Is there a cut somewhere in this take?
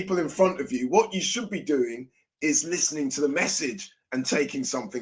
no; 0 cuts

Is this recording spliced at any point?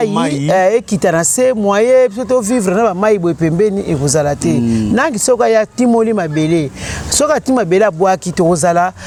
no; 0 cuts

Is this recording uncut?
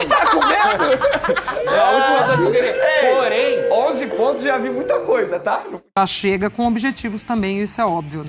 no; 1 cut; at 5.9 s

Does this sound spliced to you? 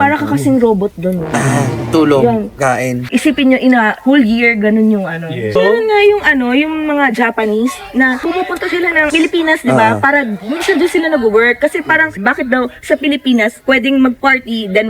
yes; 2 cuts; at 3.0 s, 5.6 s

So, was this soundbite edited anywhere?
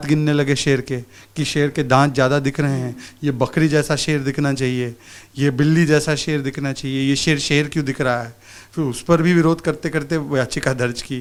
no; 0 cuts

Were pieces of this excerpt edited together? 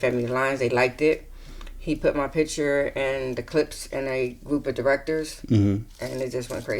no; 0 cuts

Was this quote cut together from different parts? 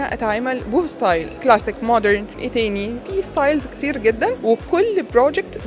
yes; 3 cuts; at 1.4 s, 2.6 s, 4.4 s

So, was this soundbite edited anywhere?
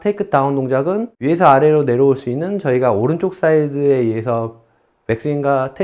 yes; 1 cut; at 1.1 s

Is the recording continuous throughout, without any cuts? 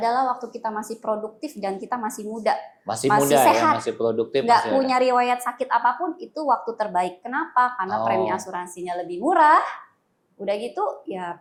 yes; 0 cuts

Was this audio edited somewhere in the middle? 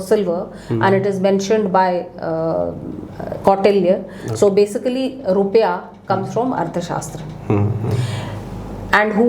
no; 0 cuts

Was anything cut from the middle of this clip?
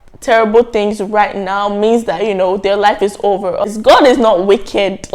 yes; 1 cut; at 3.6 s

